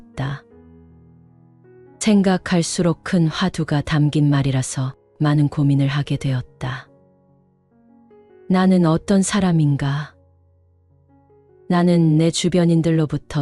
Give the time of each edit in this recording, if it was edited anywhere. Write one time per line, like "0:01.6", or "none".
0:06.9
0:08.4